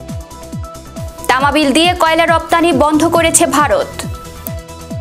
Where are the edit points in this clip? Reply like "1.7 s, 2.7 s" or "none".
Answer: 1.3 s, 3.9 s